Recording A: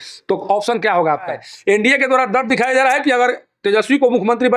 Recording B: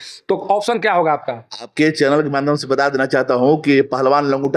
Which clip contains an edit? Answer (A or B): A